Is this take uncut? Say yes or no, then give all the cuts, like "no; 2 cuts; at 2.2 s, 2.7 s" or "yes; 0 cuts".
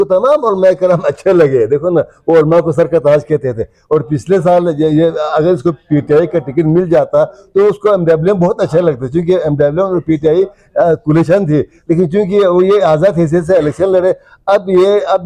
yes; 0 cuts